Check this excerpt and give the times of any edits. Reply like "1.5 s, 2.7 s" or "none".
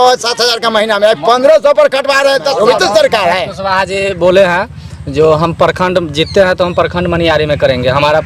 2.5 s